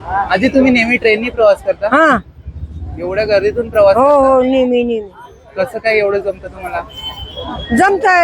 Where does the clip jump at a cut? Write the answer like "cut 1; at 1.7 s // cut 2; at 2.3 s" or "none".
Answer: none